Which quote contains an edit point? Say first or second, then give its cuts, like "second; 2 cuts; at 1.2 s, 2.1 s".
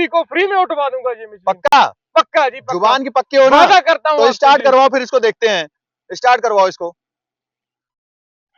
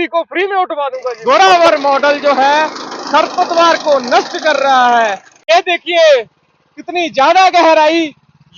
second; 2 cuts; at 1.1 s, 5.3 s